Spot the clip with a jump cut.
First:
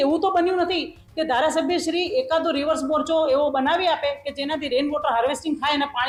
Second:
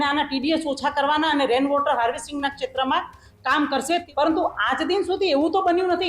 second; 1 cut; at 4.1 s

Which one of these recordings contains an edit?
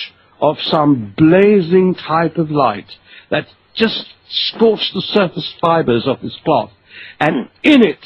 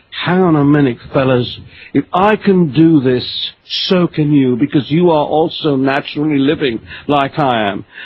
first; 1 cut; at 3.9 s

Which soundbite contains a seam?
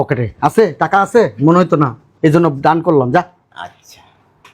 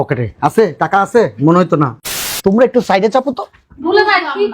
second; 1 cut; at 2.0 s

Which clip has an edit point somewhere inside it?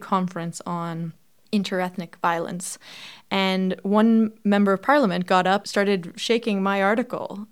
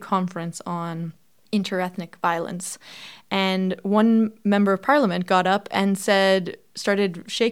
first; 1 cut; at 5.7 s

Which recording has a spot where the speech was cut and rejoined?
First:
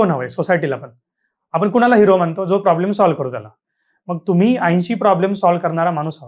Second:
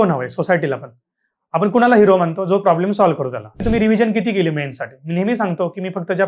second; 1 cut; at 3.6 s

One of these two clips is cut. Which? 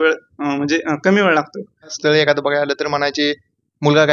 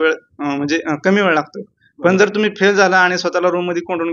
first; 1 cut; at 1.9 s

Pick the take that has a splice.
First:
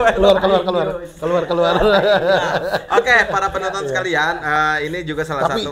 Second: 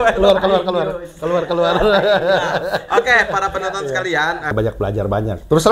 second; 1 cut; at 4.5 s

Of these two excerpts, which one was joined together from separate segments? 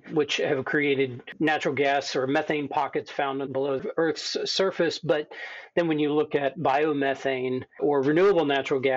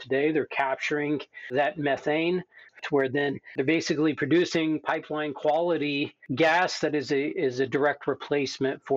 second; 1 cut; at 2.7 s

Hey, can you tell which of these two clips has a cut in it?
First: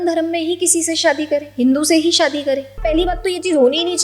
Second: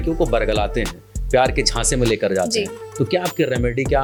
first; 1 cut; at 2.8 s

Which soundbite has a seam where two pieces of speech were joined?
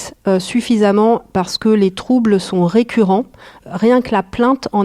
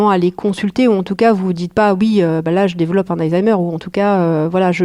first; 1 cut; at 3.6 s

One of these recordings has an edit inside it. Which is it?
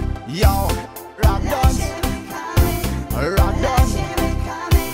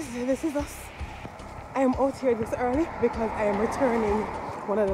first; 1 cut; at 2.8 s

